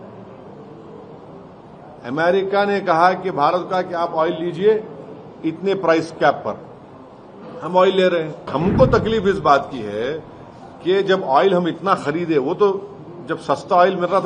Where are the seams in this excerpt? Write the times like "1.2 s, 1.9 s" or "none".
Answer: 8.5 s